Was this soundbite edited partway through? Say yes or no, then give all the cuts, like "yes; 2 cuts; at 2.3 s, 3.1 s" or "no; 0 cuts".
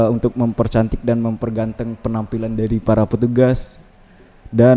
no; 0 cuts